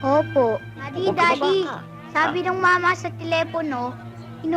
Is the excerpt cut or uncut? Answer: cut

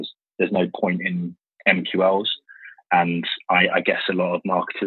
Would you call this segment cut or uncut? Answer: uncut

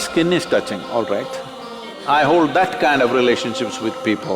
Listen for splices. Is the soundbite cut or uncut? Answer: cut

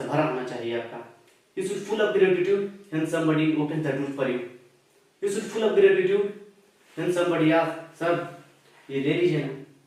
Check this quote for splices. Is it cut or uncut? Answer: uncut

